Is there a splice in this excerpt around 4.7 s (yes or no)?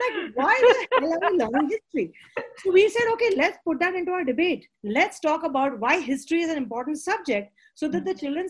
yes